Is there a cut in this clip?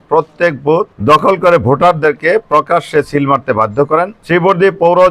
yes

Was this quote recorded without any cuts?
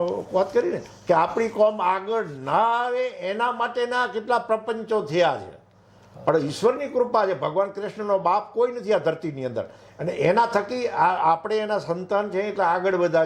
yes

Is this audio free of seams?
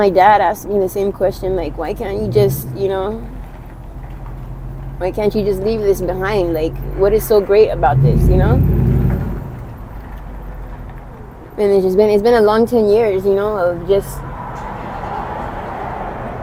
yes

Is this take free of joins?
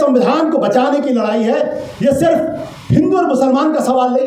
yes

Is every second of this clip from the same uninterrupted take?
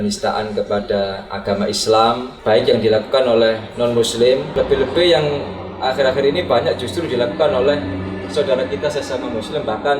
no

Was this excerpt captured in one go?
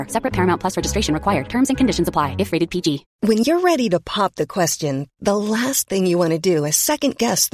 yes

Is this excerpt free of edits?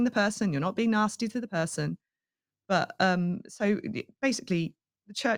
yes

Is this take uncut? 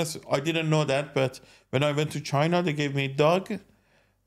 yes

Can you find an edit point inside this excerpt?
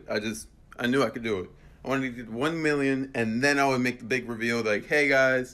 no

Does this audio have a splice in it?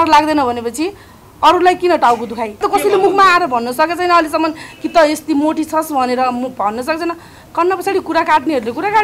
yes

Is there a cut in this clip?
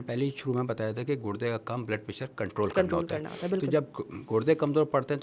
no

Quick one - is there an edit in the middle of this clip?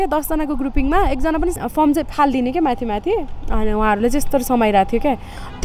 yes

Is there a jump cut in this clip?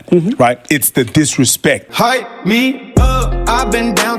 yes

